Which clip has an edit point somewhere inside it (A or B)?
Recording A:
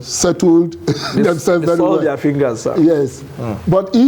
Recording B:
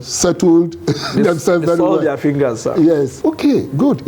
B